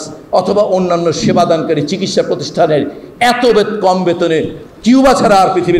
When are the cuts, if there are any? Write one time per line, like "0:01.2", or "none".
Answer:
none